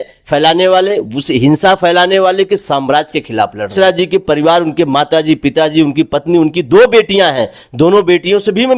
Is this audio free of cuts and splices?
no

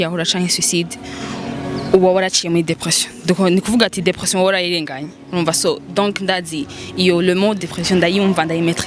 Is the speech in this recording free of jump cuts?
yes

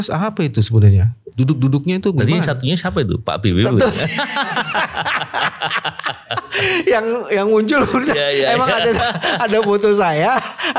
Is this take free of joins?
yes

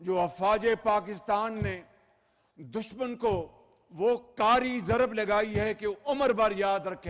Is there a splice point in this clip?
no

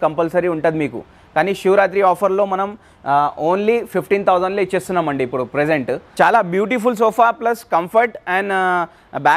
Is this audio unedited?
no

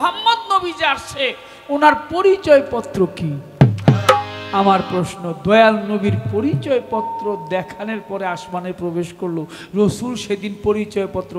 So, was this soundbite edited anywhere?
no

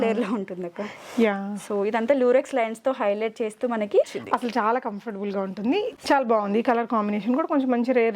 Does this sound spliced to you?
yes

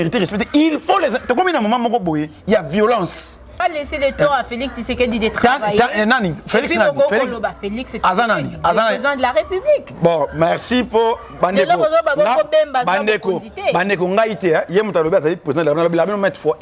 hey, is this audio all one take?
no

